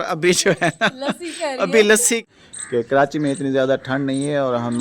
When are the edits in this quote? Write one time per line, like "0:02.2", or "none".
0:02.2